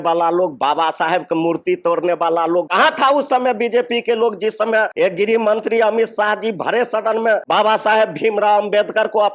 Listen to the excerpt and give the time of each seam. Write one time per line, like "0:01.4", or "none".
0:02.7
0:04.9
0:07.4

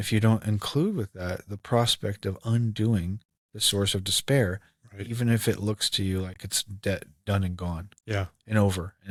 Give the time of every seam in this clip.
none

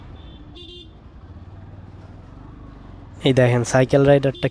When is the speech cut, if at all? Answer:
0:03.0

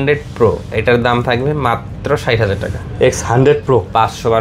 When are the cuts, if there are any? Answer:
none

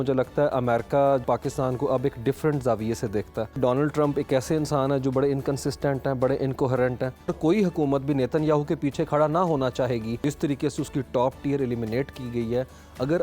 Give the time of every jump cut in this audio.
0:01.2
0:03.6
0:07.3
0:10.1

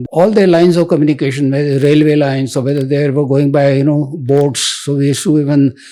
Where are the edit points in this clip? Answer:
none

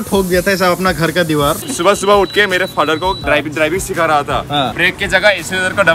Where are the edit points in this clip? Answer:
0:01.6
0:03.2
0:04.8

